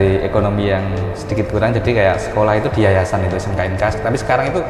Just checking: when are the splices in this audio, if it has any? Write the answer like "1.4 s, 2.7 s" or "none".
none